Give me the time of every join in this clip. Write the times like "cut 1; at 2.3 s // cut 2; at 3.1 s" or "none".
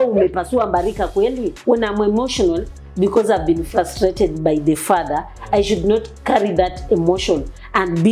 cut 1; at 1.5 s